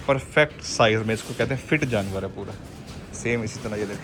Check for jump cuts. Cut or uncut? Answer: uncut